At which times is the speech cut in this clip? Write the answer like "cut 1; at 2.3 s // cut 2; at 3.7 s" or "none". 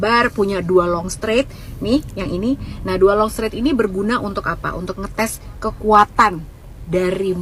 none